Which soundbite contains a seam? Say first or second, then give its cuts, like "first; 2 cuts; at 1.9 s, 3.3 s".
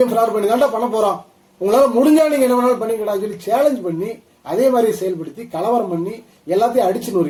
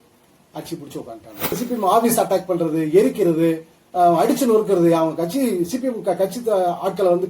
second; 1 cut; at 1.6 s